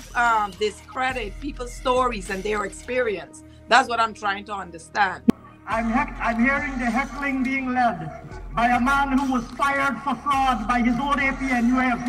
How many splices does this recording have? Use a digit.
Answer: 1